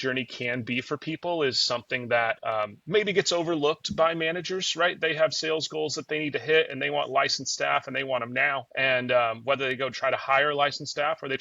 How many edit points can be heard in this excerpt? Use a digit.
2